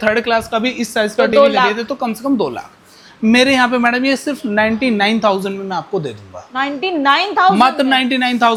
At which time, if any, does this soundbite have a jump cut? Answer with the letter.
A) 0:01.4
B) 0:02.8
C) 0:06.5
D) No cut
D